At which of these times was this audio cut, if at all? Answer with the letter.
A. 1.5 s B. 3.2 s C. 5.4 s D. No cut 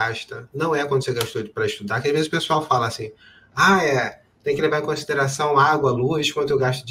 D